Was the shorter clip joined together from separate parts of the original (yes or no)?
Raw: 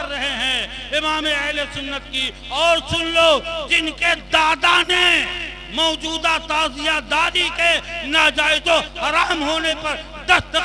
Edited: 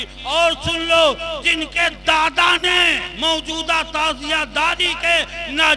yes